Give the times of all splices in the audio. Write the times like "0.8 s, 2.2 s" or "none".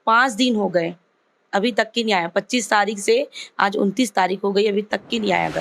none